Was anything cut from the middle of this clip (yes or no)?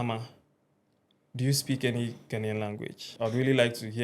yes